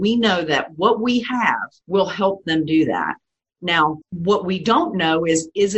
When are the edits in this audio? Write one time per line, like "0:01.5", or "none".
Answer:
0:01.7
0:04.1